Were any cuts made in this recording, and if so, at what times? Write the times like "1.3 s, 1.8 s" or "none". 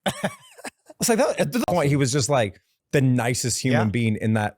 1.7 s